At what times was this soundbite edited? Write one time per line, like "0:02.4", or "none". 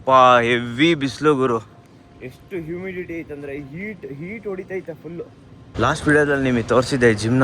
0:05.6